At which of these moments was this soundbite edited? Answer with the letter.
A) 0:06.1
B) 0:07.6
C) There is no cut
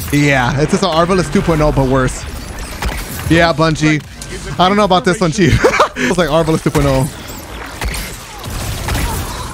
A